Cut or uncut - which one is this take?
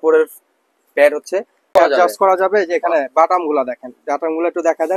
cut